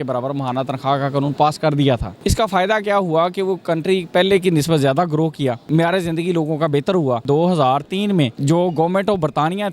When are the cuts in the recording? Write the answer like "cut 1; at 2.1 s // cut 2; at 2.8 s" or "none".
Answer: cut 1; at 2.1 s // cut 2; at 5.6 s // cut 3; at 7.2 s // cut 4; at 8.4 s

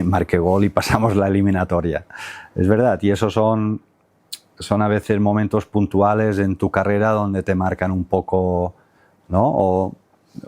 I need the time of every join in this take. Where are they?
none

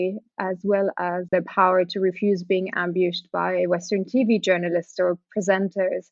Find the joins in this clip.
cut 1; at 1.3 s

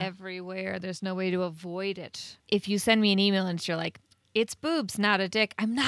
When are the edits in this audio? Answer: cut 1; at 2.4 s

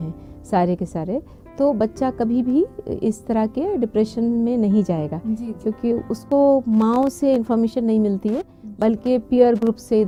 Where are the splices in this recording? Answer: none

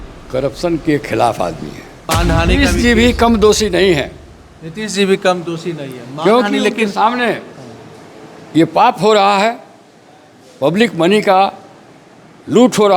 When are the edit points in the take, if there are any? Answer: cut 1; at 2.2 s

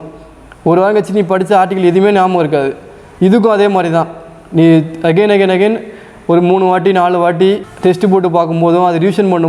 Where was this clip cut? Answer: none

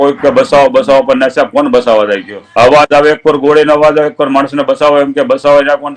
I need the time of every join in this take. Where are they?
cut 1; at 2.4 s

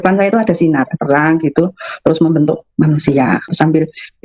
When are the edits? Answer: cut 1; at 0.9 s // cut 2; at 3.5 s

